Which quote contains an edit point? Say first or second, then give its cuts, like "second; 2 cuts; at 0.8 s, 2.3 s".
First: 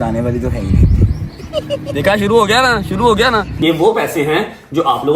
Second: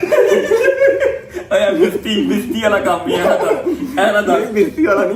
first; 2 cuts; at 1.8 s, 3.5 s